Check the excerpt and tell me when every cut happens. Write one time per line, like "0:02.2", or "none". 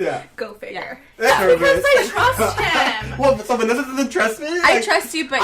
0:01.3

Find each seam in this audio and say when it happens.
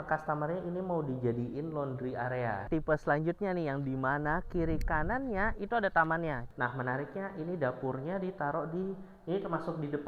0:02.6
0:06.4

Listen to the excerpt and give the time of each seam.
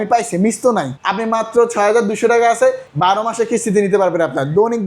0:01.0
0:02.9

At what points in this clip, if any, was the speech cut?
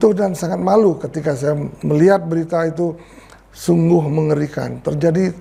none

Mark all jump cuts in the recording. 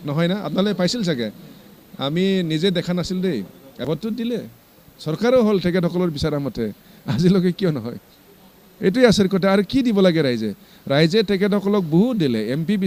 0:03.6

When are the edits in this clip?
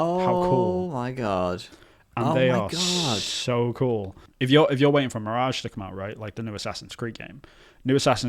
0:04.2

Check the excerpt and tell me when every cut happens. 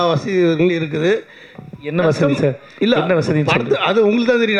none

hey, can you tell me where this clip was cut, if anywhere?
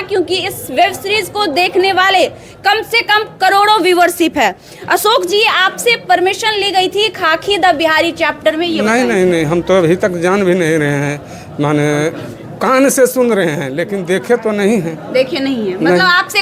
none

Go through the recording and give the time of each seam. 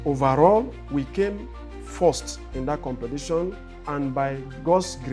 0:03.7

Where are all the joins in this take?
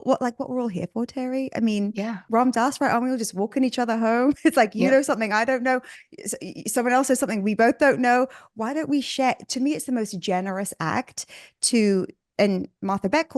0:02.2

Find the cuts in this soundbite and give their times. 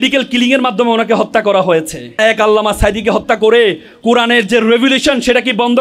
0:02.2

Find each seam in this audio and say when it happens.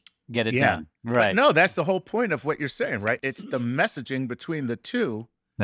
0:03.2

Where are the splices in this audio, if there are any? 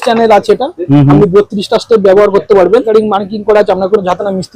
0:02.9

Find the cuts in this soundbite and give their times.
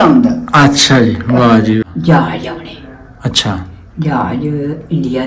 0:01.9

